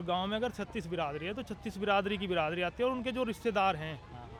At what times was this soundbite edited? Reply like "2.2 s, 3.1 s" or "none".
none